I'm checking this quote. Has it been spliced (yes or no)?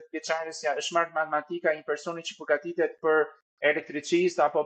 no